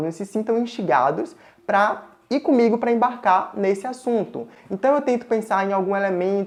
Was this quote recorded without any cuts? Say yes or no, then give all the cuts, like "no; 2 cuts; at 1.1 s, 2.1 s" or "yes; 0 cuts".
yes; 0 cuts